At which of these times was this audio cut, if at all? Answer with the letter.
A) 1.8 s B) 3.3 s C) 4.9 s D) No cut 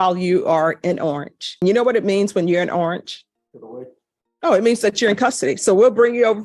D